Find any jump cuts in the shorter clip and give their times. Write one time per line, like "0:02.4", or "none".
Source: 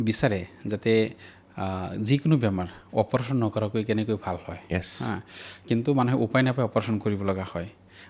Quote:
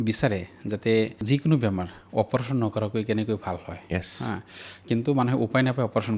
0:01.2